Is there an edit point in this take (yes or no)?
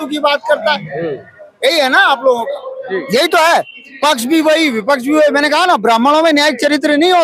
no